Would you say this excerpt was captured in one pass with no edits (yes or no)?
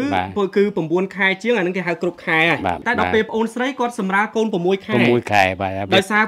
no